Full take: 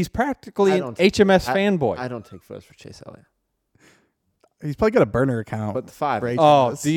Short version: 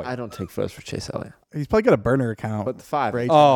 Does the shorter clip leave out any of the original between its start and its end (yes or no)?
yes